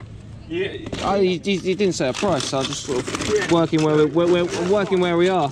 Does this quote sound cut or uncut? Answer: uncut